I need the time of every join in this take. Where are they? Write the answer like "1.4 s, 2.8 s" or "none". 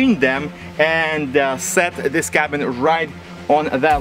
none